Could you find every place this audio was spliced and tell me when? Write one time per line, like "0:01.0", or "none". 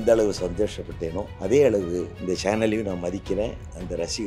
0:01.3
0:02.1